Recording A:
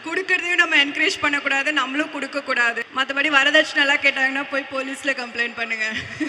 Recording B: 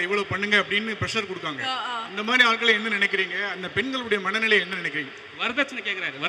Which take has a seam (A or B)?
A